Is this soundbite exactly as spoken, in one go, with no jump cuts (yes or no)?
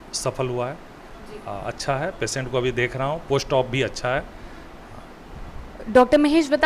yes